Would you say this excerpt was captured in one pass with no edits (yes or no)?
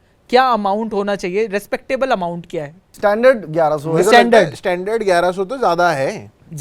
no